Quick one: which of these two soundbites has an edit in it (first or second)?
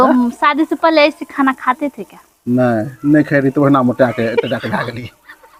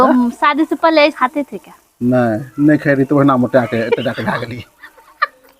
second